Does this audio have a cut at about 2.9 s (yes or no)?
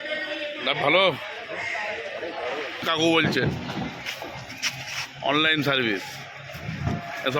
yes